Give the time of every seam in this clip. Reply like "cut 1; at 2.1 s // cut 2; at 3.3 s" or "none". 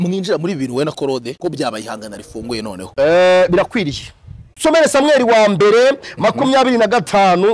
cut 1; at 1.3 s // cut 2; at 2.8 s // cut 3; at 4.6 s